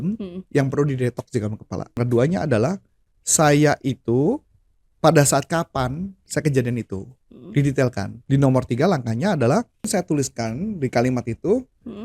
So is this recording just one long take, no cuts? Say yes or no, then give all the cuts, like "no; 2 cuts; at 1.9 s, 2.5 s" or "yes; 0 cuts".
no; 2 cuts; at 2.0 s, 8.1 s